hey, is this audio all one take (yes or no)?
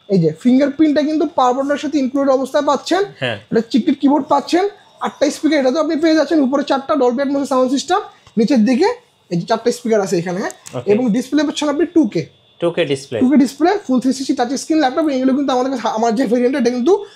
yes